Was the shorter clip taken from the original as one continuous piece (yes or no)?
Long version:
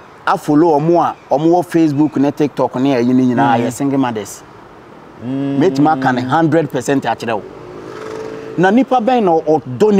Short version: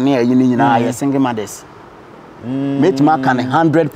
yes